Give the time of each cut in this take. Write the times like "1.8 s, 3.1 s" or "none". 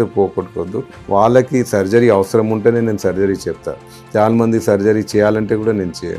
0.9 s